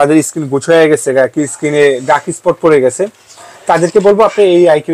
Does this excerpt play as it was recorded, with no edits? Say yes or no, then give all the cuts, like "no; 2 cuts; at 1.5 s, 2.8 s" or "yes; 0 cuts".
yes; 0 cuts